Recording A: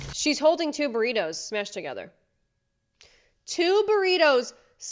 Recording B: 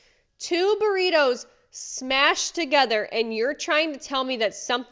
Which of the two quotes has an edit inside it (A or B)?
A